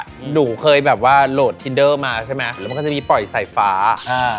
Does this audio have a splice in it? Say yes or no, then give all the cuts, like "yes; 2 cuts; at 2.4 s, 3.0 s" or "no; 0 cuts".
yes; 1 cut; at 2.6 s